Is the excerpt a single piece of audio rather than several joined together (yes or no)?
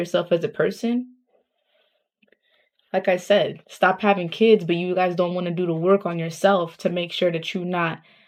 yes